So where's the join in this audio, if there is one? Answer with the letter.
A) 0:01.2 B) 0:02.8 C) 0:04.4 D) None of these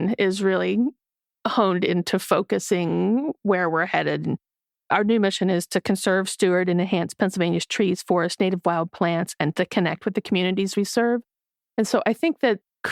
D